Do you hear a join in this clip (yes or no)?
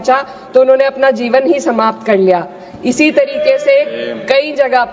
no